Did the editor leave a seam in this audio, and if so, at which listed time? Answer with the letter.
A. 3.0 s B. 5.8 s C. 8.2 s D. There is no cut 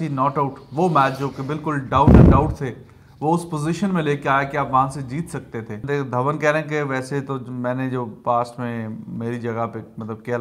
B